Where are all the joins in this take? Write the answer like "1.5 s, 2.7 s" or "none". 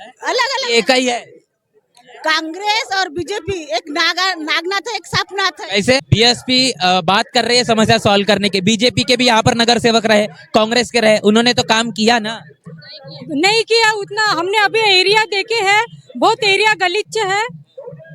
6.0 s

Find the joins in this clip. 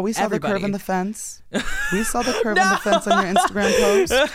none

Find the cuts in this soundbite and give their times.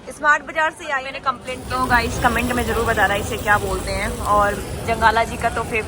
1.7 s

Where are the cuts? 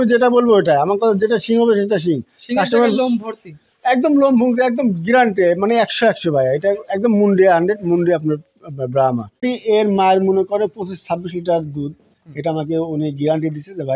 9.4 s

